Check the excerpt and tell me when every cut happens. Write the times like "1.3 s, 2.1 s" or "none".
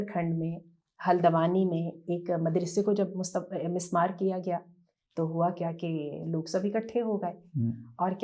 none